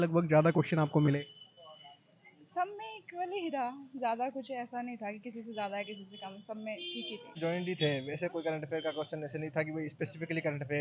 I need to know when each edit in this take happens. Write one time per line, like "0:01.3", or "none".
0:07.4